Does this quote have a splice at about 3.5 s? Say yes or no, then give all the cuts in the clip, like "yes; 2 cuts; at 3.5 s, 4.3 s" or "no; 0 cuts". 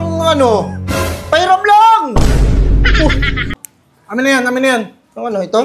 yes; 1 cut; at 3.5 s